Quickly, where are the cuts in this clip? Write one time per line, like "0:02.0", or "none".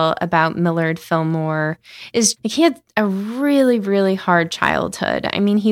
0:02.3